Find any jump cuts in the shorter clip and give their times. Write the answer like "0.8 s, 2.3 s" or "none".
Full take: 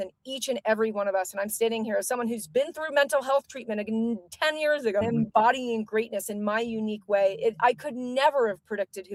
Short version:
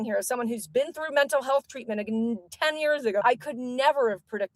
3.2 s